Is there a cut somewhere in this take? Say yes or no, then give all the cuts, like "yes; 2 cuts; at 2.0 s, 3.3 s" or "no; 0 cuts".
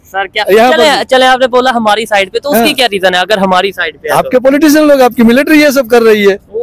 no; 0 cuts